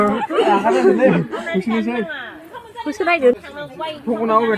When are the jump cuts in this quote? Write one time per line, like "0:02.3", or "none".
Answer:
0:03.4